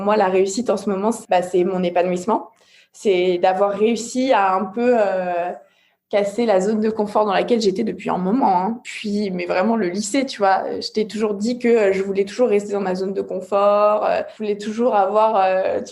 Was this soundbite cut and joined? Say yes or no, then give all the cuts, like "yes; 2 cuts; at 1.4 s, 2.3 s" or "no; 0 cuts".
yes; 3 cuts; at 1.2 s, 8.8 s, 14.3 s